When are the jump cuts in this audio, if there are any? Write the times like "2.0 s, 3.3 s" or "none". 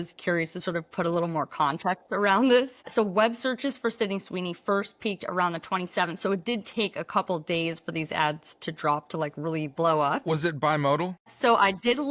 2.9 s, 11.2 s